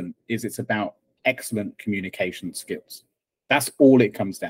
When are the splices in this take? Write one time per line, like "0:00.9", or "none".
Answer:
none